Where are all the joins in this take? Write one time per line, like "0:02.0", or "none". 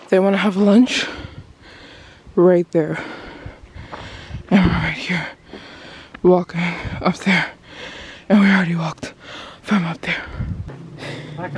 0:10.7